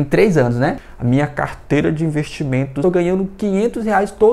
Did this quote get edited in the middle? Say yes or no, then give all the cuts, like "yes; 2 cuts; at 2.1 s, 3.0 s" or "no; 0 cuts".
yes; 2 cuts; at 0.8 s, 2.8 s